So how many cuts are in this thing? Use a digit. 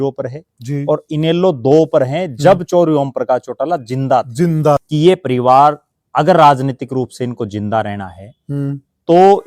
1